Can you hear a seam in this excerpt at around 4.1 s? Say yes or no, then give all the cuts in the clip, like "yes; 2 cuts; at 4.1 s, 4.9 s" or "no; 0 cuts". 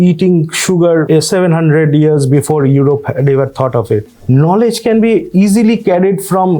yes; 2 cuts; at 1.1 s, 4.1 s